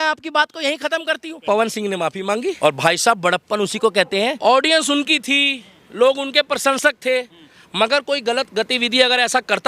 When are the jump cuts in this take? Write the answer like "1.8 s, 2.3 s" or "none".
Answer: 1.4 s, 2.6 s, 4.4 s